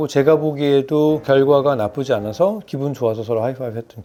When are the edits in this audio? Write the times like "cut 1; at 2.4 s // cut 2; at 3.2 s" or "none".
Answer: none